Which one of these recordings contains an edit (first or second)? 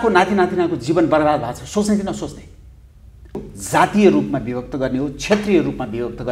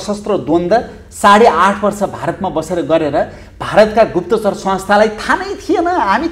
first